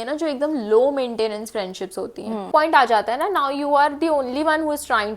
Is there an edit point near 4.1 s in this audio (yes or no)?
no